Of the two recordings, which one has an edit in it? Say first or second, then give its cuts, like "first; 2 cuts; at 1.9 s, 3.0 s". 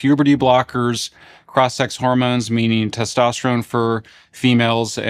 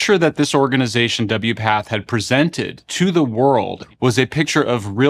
second; 1 cut; at 3.8 s